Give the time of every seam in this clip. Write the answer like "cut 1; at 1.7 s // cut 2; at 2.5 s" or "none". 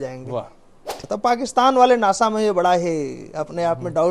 cut 1; at 1.0 s